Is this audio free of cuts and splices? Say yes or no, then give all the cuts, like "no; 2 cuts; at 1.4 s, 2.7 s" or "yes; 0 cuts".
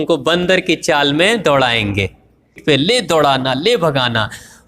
no; 1 cut; at 2.6 s